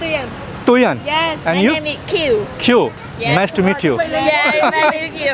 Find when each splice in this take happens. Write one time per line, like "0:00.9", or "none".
none